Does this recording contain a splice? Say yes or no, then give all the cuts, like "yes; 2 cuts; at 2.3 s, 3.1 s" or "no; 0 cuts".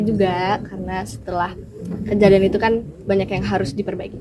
no; 0 cuts